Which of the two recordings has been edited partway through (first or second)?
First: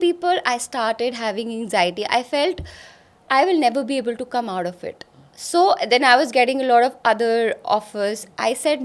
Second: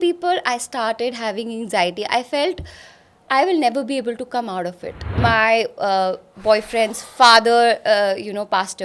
second